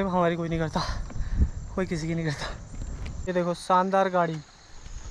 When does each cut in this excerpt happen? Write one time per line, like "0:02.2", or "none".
0:03.1